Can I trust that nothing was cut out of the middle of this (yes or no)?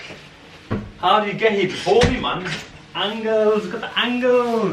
yes